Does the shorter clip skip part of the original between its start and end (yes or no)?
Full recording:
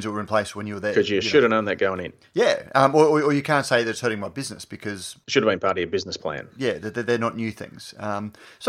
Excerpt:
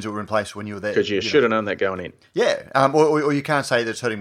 no